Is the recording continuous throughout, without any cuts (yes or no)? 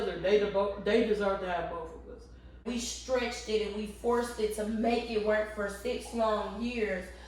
no